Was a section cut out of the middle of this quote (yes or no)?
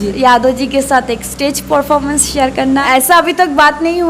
yes